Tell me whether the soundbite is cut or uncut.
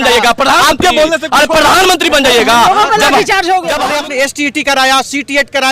cut